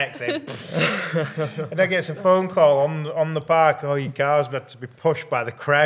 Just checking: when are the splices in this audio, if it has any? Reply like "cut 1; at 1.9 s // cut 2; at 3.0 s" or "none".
none